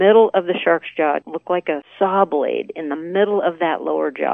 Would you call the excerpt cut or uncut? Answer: cut